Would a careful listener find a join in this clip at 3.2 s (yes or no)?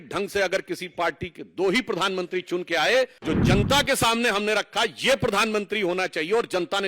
yes